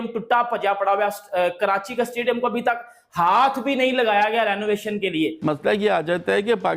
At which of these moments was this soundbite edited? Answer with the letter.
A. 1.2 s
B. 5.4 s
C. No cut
B